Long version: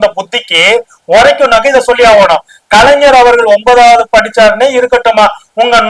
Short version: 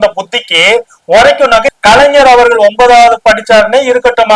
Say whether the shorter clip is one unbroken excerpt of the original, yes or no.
no